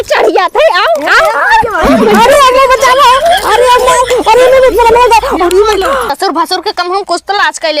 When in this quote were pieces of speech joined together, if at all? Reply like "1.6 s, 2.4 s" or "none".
6.1 s